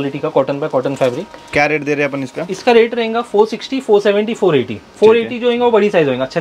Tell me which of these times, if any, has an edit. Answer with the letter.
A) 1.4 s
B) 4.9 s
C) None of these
C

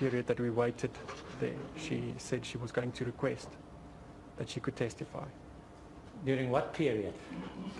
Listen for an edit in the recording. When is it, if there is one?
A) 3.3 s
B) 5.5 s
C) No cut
C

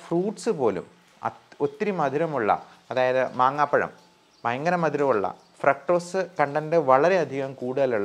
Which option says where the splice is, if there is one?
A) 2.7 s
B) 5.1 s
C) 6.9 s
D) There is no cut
D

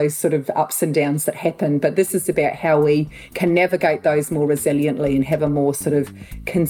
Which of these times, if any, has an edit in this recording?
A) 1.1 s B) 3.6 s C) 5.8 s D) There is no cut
D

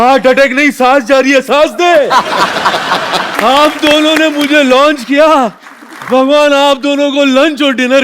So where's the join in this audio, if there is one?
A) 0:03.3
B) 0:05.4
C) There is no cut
A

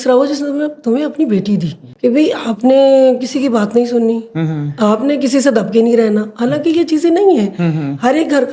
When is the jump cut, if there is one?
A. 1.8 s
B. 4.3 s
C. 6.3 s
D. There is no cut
A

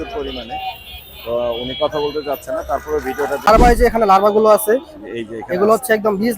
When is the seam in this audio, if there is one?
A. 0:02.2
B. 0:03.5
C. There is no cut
B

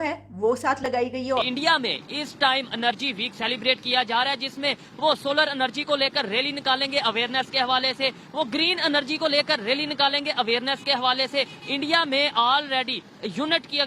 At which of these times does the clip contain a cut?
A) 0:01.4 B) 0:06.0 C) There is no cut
A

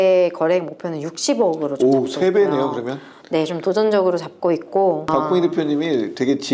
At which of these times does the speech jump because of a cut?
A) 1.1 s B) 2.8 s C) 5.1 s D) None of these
C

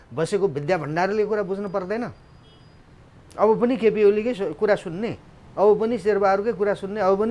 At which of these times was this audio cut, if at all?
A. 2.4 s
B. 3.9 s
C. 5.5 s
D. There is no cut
D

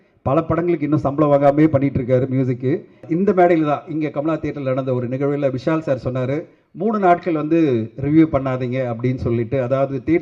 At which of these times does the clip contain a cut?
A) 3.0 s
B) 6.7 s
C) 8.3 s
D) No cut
A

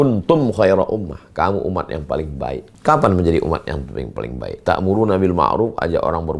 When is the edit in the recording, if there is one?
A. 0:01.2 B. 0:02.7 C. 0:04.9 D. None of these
B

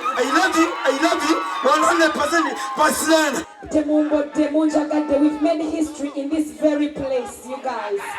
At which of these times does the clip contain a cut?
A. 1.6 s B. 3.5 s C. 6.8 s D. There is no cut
B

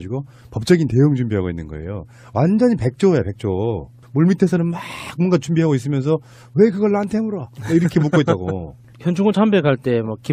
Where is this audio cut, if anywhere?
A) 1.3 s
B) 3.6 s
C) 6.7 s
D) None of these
B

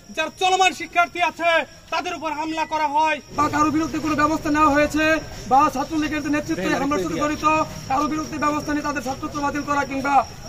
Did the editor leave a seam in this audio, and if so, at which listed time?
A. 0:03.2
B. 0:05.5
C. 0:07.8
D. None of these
A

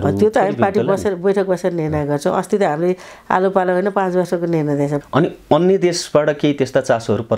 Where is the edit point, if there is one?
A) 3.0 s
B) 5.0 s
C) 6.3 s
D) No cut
B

